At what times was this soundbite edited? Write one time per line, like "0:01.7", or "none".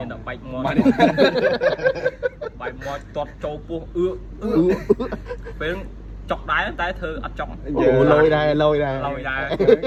none